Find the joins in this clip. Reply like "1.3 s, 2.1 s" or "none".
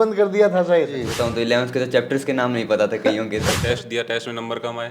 1.1 s, 3.5 s